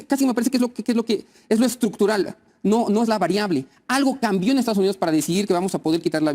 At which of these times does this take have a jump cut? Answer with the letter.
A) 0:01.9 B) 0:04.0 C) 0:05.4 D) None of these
D